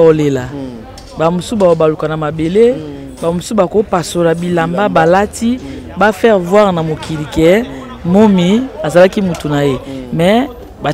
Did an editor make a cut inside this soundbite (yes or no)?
no